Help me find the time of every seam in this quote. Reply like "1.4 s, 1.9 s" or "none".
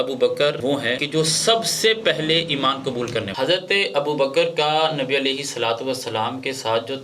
3.3 s